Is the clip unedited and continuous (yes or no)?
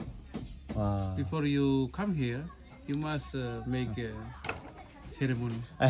yes